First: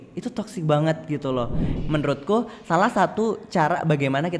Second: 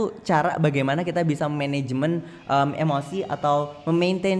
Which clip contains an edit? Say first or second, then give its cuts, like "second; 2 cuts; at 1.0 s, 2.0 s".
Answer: first; 1 cut; at 1.7 s